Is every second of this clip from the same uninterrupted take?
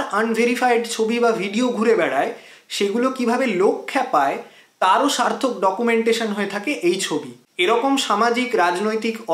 no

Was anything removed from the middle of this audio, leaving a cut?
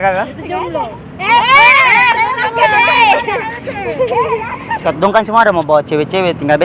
yes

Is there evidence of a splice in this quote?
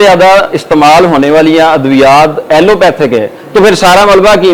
no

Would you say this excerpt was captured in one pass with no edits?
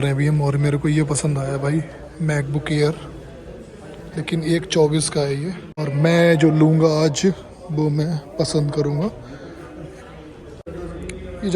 no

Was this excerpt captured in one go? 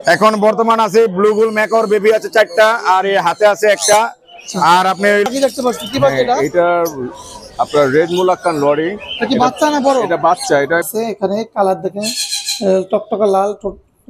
no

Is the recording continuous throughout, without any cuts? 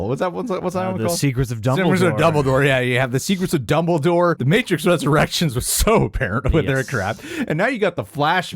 yes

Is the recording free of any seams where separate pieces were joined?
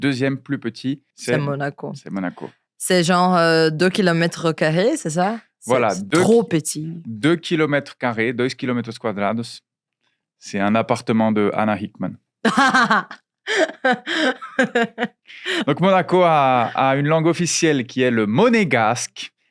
yes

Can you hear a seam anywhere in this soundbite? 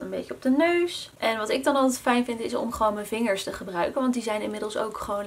no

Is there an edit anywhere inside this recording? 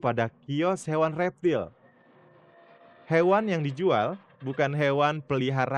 no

